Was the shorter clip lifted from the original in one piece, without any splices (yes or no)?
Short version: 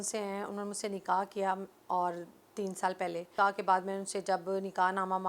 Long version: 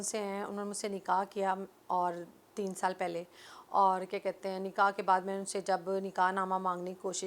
no